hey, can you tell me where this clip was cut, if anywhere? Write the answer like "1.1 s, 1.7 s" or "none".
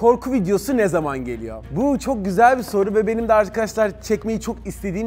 none